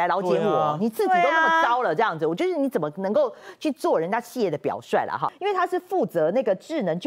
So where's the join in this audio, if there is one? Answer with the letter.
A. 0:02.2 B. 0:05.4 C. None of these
B